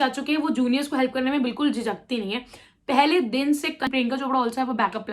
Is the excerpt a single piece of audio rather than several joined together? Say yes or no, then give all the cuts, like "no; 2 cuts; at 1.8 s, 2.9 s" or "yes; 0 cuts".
no; 1 cut; at 3.9 s